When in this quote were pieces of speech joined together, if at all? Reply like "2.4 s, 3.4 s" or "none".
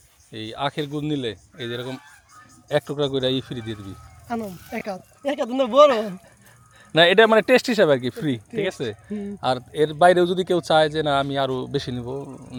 none